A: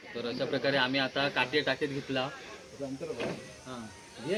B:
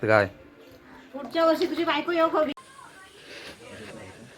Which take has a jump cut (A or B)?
B